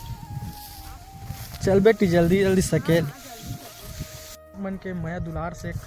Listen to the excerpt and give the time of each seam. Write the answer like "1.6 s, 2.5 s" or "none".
4.5 s